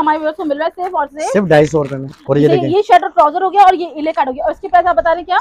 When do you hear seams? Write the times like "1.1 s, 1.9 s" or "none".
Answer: 2.2 s

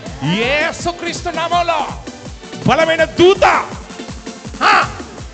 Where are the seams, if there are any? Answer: none

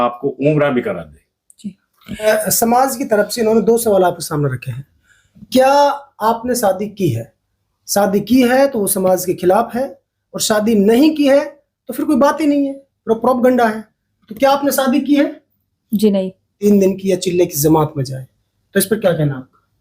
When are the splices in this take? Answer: 2.4 s, 16.5 s

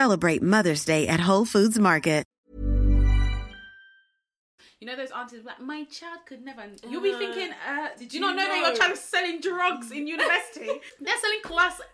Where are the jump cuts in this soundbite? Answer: 2.4 s, 4.5 s, 10.8 s

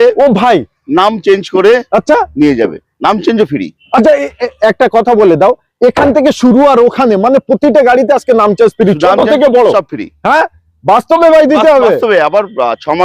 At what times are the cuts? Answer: none

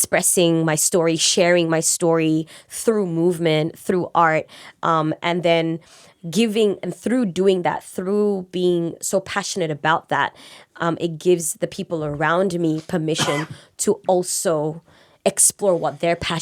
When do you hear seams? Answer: none

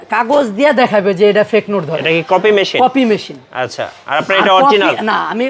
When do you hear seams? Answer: none

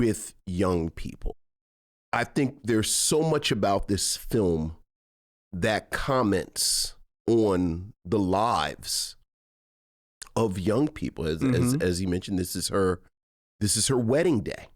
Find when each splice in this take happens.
1.5 s

